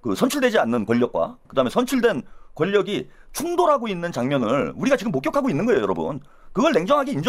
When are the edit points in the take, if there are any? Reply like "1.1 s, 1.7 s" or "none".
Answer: 1.4 s